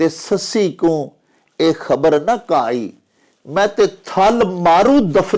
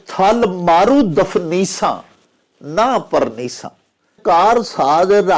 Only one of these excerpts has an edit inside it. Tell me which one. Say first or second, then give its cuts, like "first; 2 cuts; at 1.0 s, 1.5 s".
second; 1 cut; at 4.2 s